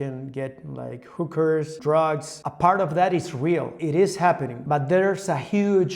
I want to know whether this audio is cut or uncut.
cut